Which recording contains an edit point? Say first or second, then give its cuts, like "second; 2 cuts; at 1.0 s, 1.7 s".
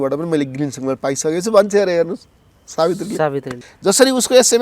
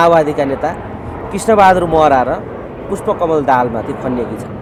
first; 1 cut; at 3.5 s